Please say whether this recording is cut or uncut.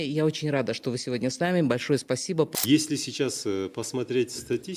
cut